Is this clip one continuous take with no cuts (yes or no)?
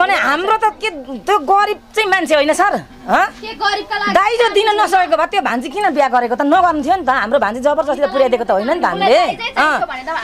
yes